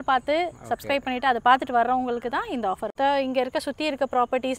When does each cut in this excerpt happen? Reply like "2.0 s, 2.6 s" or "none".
2.9 s